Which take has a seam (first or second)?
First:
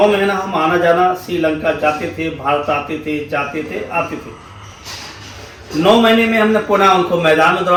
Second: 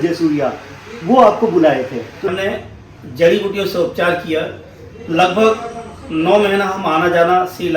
second